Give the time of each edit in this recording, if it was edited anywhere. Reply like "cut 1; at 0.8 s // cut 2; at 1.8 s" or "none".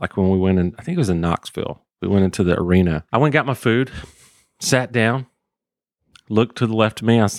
cut 1; at 3.0 s